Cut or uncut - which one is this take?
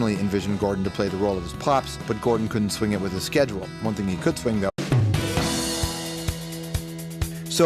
uncut